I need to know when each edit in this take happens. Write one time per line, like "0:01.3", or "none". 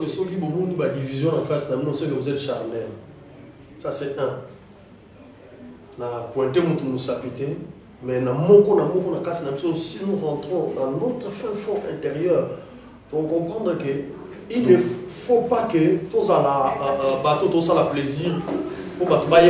none